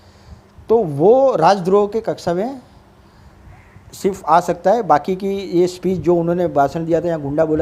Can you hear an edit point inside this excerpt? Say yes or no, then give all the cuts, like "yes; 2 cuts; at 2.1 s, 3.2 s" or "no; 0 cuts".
no; 0 cuts